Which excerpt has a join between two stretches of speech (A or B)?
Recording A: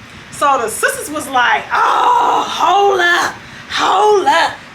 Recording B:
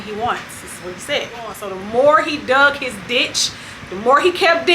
B